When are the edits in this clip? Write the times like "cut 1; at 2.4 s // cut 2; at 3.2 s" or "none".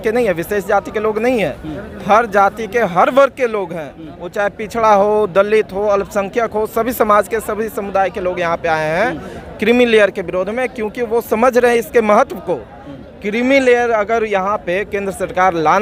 none